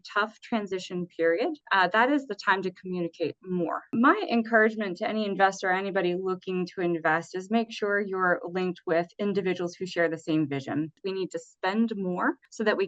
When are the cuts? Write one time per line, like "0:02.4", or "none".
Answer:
0:03.9
0:11.0